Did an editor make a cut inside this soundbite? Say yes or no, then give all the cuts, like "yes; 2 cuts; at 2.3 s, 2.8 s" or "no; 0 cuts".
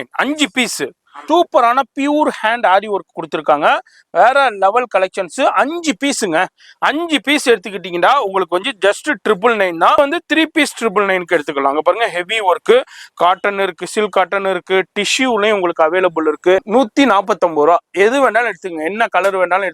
yes; 3 cuts; at 1.1 s, 10.0 s, 16.7 s